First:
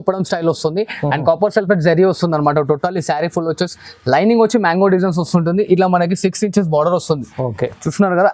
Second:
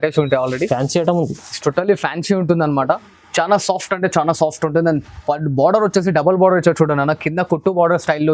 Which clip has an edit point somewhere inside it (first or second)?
second